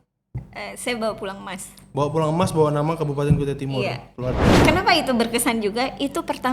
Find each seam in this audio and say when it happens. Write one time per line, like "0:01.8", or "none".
0:04.6